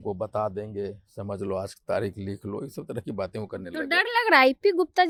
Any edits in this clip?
no; 0 cuts

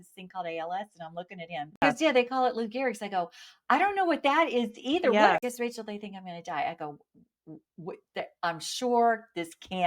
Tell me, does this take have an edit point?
yes; 2 cuts; at 1.8 s, 5.5 s

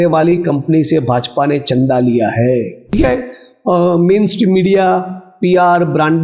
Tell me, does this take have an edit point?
yes; 1 cut; at 2.9 s

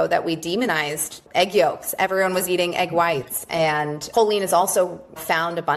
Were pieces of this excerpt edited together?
no; 0 cuts

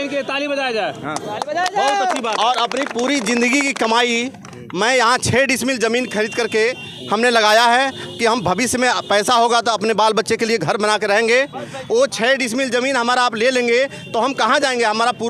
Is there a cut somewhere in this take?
no; 0 cuts

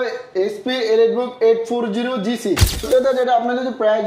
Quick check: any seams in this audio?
yes; 1 cut; at 2.9 s

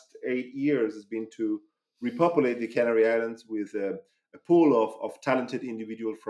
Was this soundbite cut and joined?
no; 0 cuts

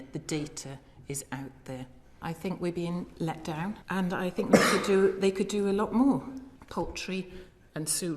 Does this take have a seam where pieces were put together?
yes; 3 cuts; at 2.2 s, 3.8 s, 6.5 s

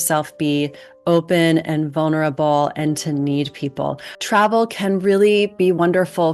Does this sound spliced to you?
yes; 1 cut; at 4.1 s

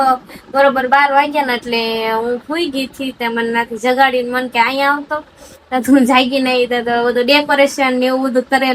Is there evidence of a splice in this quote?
no; 0 cuts

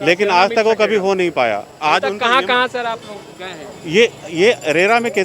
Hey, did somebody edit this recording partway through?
no; 0 cuts

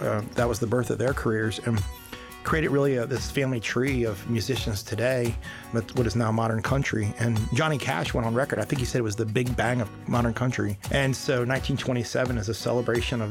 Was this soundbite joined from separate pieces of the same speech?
yes; 2 cuts; at 5.6 s, 10.8 s

